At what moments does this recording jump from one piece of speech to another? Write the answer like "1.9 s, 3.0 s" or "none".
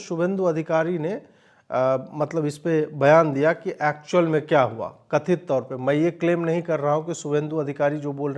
none